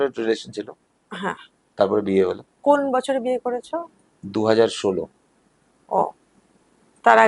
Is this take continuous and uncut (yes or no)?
yes